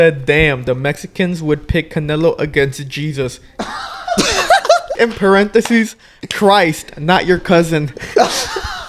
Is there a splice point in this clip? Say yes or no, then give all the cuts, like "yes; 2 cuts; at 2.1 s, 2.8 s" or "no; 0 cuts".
yes; 1 cut; at 4.9 s